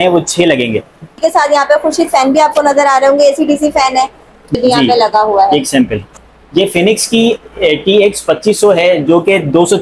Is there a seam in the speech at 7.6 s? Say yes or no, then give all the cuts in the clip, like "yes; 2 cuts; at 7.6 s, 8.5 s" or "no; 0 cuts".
no; 3 cuts; at 1.1 s, 4.5 s, 6.1 s